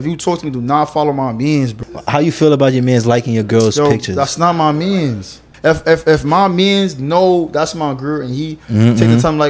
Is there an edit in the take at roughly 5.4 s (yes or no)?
yes